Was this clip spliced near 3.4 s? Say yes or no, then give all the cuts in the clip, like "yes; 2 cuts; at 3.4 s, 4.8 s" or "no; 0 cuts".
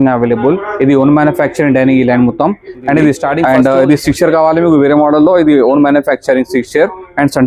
yes; 1 cut; at 3.4 s